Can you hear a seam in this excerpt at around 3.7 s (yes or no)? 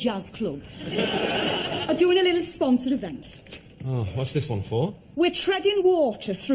no